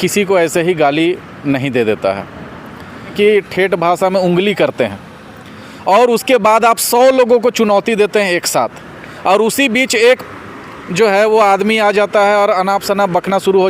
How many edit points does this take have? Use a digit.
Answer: 1